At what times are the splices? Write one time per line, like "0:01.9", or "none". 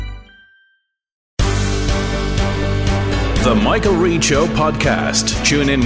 0:01.4